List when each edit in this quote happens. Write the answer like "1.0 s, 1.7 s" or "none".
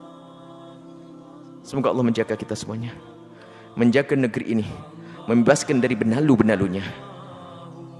1.7 s